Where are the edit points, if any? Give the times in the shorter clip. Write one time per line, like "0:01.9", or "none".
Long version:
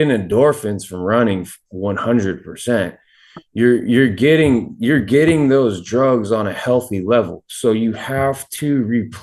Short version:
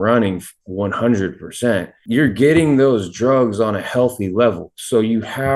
0:02.0